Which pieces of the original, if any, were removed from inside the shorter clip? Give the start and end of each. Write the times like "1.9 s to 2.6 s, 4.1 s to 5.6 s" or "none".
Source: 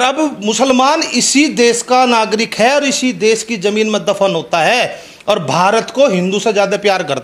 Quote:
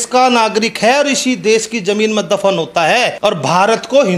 4.9 s to 5.2 s